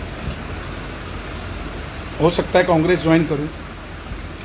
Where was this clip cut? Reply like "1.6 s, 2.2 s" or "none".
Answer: none